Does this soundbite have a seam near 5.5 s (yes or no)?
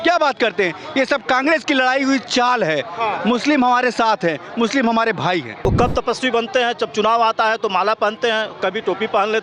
yes